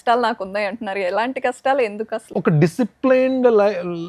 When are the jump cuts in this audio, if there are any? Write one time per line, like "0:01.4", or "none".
0:02.2